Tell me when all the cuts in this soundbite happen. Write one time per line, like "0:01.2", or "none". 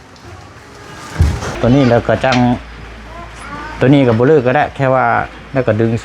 0:01.5